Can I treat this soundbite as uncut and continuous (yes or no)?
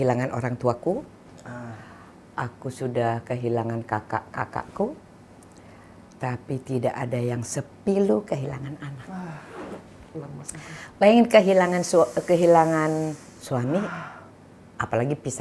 yes